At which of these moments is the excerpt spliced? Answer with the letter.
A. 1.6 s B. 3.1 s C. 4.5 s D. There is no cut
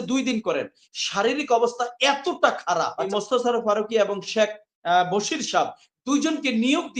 B